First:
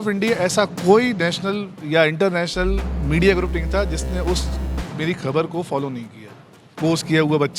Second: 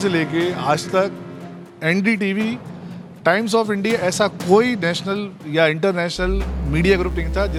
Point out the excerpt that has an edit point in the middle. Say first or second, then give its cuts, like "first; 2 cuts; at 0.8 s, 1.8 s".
first; 1 cut; at 6.6 s